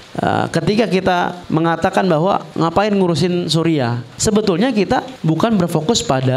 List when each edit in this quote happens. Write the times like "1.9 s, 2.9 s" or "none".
1.4 s, 2.5 s, 4.0 s, 5.1 s